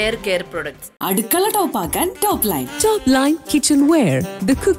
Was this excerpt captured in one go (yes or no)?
yes